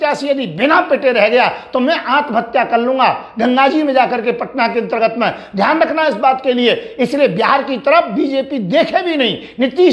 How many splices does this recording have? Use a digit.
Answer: 0